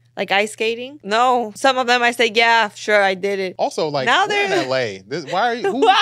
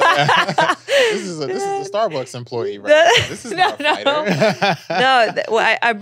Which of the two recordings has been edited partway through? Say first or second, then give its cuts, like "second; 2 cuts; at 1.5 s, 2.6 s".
first; 3 cuts; at 0.9 s, 1.5 s, 3.5 s